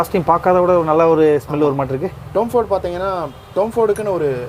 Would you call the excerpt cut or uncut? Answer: uncut